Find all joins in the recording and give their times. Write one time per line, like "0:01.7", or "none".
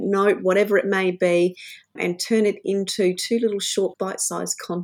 0:02.0
0:03.9